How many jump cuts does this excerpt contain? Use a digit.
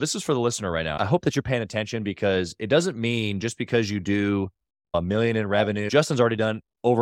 2